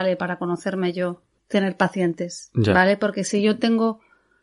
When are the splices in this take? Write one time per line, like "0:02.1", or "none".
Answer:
0:01.3